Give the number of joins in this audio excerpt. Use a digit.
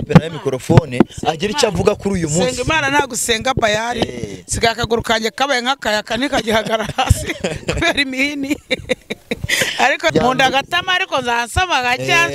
1